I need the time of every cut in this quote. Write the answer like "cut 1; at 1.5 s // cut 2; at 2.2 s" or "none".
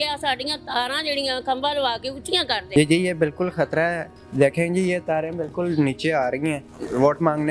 cut 1; at 2.6 s // cut 2; at 6.6 s